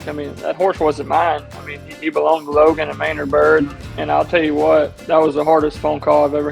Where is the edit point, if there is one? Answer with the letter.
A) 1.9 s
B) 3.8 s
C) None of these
B